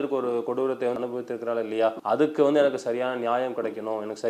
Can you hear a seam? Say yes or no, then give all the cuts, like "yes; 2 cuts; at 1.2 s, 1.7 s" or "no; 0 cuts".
no; 0 cuts